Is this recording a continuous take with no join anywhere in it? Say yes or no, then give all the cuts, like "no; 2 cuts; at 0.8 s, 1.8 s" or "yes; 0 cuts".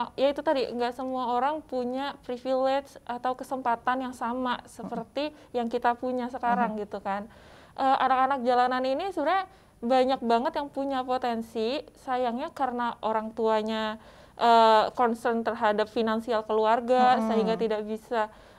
yes; 0 cuts